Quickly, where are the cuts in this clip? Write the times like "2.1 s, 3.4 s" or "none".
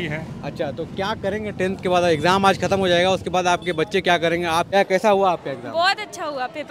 4.7 s

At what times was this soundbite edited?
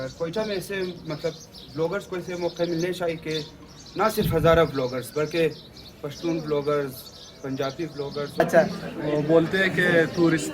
8.4 s

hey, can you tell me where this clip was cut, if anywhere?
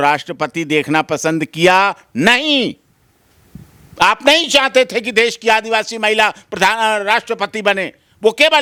none

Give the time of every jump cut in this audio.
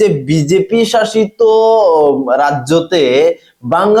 none

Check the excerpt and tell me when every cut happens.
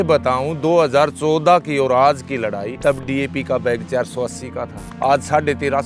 2.7 s, 4.8 s

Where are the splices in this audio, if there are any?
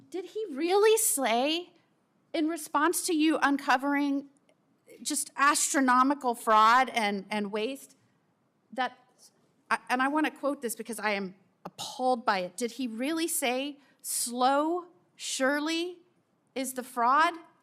none

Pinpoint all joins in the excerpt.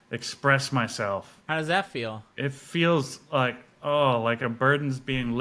1.4 s, 4.4 s

